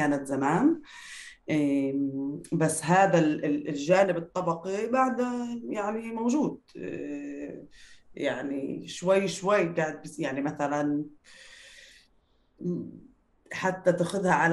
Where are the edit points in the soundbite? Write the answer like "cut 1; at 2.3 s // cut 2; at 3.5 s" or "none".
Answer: none